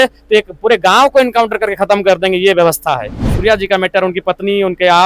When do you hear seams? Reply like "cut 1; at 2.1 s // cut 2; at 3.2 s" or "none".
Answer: cut 1; at 3.2 s